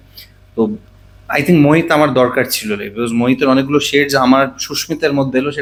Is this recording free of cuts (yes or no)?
yes